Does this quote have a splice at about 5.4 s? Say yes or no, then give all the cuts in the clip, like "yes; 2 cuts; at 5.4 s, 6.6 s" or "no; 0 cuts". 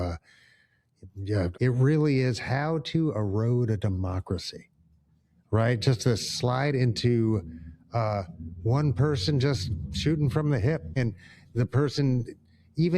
no; 2 cuts; at 1.5 s, 11.0 s